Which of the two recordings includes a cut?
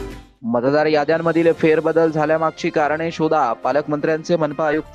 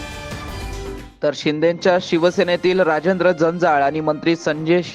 second; 1 cut; at 1.1 s

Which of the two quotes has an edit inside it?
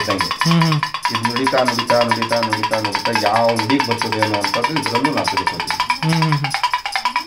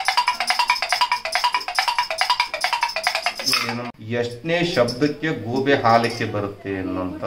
second; 1 cut; at 3.8 s

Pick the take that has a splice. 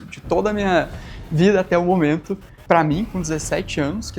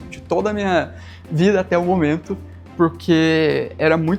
first; 1 cut; at 2.5 s

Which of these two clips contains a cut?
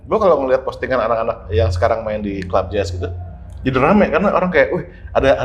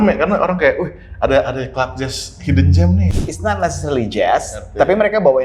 second; 1 cut; at 3.2 s

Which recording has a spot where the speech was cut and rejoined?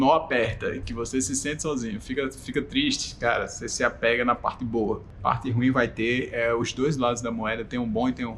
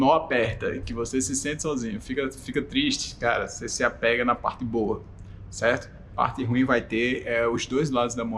first; 1 cut; at 5.1 s

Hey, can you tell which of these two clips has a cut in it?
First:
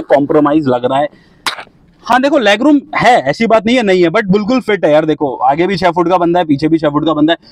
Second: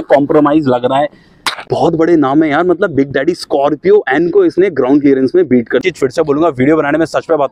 second; 2 cuts; at 1.7 s, 5.8 s

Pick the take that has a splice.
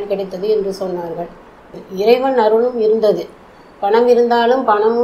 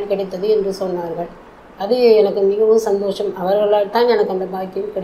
first; 1 cut; at 1.8 s

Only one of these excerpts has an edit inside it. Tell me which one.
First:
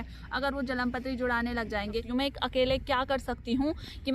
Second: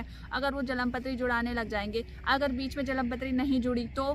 first; 1 cut; at 2.0 s

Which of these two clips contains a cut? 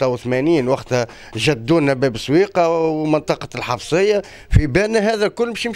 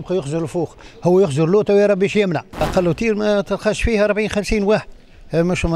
second; 1 cut; at 2.5 s

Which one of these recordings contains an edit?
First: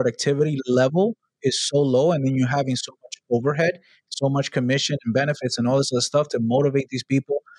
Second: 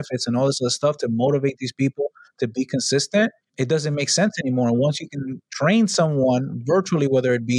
second; 1 cut; at 3.4 s

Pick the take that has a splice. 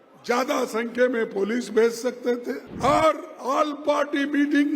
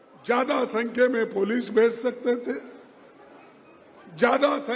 first; 1 cut; at 2.7 s

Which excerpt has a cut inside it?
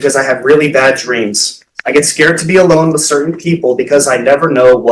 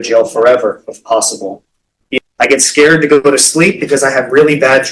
second; 1 cut; at 2.2 s

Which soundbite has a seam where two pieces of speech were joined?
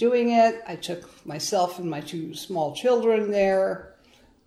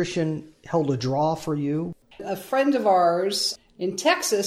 second; 2 cuts; at 2.2 s, 3.5 s

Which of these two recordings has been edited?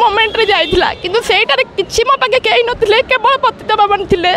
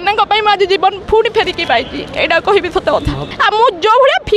second; 1 cut; at 3.3 s

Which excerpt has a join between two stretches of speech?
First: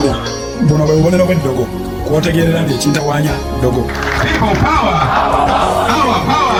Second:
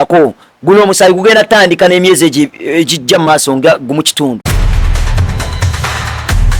second; 1 cut; at 4.5 s

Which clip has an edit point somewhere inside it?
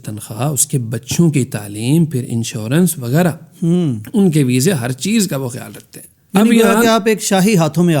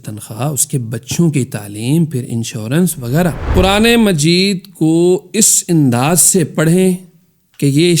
second; 1 cut; at 3.5 s

